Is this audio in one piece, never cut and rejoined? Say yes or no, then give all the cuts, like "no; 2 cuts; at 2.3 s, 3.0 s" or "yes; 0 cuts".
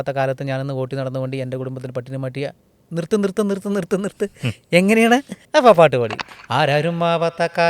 no; 2 cuts; at 5.4 s, 6.1 s